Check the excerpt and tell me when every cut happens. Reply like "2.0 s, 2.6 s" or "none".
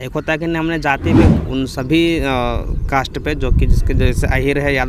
1.4 s